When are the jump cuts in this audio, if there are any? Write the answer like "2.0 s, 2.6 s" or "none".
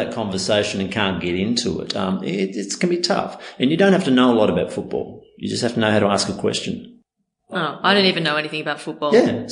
none